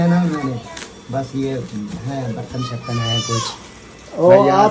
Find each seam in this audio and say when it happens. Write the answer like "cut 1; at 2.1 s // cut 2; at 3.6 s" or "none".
none